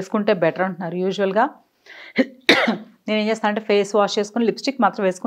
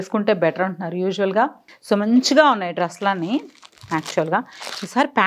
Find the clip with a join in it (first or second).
second